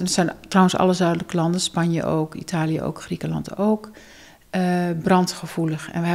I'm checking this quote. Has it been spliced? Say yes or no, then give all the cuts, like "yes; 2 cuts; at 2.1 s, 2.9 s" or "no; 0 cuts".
no; 0 cuts